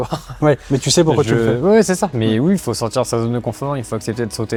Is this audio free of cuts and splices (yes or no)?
yes